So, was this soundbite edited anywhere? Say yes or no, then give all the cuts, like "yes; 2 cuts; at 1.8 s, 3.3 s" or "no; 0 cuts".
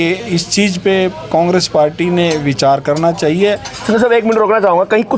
no; 0 cuts